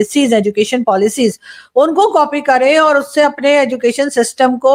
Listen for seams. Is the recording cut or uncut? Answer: uncut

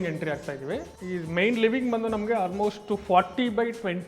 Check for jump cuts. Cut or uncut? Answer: cut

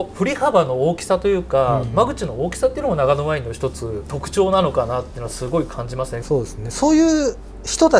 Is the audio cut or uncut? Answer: cut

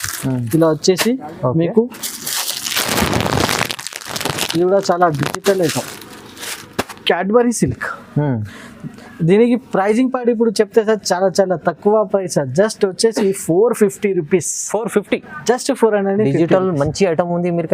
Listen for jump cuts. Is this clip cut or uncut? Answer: uncut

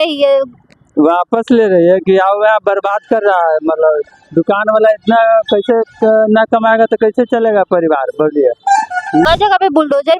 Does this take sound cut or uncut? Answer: cut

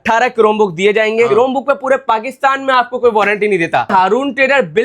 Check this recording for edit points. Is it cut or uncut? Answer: cut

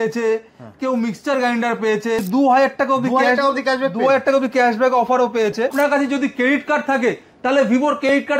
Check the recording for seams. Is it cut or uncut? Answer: cut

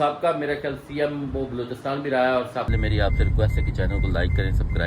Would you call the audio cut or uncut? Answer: cut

